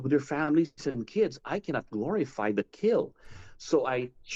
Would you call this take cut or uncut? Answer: uncut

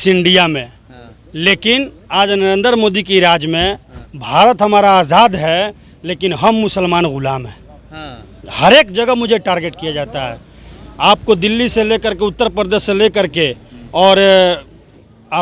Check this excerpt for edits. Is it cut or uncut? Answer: uncut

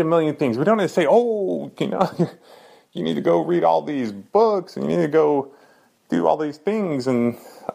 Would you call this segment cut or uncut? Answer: uncut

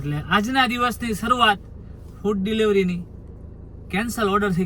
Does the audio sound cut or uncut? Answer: uncut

